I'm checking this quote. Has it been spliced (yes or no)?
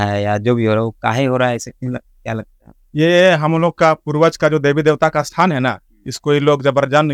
no